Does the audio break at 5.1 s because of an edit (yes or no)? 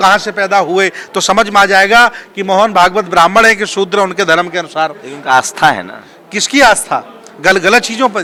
no